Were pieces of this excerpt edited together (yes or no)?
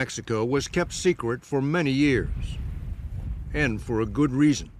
no